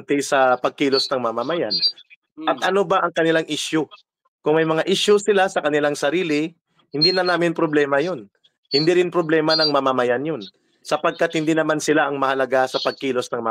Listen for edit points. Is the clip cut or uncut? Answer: uncut